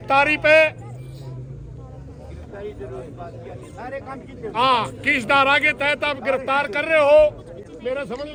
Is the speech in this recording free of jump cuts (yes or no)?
yes